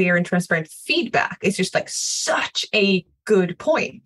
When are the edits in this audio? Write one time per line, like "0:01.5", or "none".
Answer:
0:03.1